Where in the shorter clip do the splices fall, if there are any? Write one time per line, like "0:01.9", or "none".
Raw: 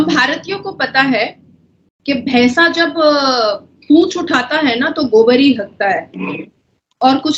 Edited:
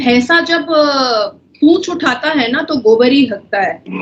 none